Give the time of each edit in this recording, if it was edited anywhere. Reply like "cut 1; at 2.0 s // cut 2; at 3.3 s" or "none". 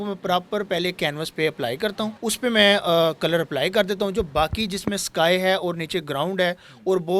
cut 1; at 2.1 s